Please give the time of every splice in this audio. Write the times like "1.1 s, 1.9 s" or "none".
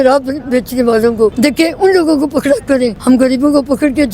1.3 s, 3.0 s